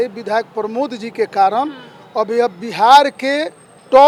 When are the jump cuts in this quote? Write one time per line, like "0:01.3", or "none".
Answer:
none